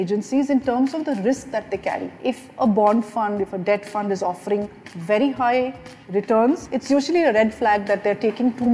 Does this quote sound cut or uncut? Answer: cut